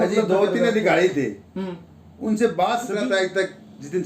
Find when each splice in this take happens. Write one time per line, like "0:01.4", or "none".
0:02.9